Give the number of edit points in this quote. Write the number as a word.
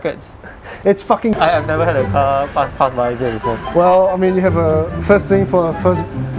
one